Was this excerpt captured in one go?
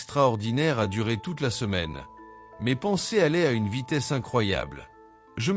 yes; 0 cuts

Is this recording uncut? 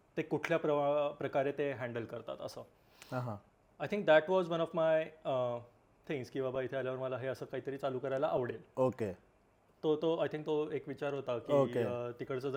yes; 0 cuts

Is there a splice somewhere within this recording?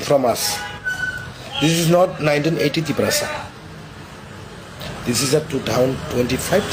no; 0 cuts

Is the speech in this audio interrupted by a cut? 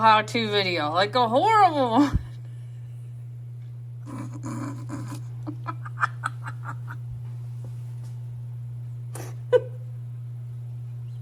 no; 0 cuts

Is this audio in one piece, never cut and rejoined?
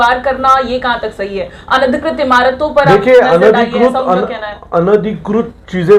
yes; 0 cuts

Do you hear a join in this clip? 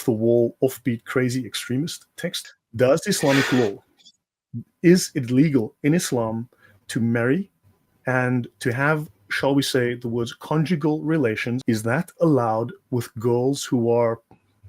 yes; 2 cuts; at 2.5 s, 11.6 s

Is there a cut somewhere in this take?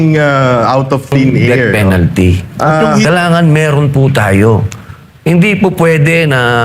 yes; 1 cut; at 1.7 s

